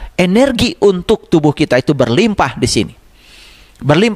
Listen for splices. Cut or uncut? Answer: uncut